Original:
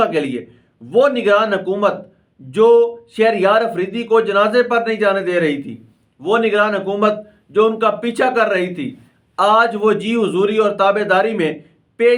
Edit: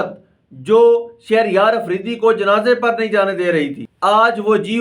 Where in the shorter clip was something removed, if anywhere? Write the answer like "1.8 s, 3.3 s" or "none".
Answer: 3.8 s